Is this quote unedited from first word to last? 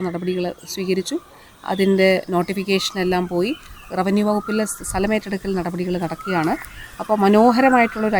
yes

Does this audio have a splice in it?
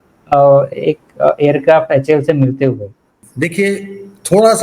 yes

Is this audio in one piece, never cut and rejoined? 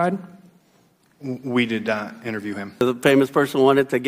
no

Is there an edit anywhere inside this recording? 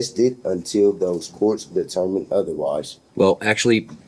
yes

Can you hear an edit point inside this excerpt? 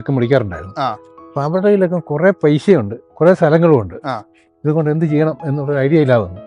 no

